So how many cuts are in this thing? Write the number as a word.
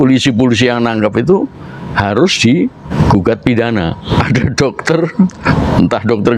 three